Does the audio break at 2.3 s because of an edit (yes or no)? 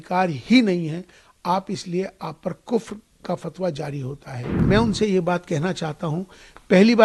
no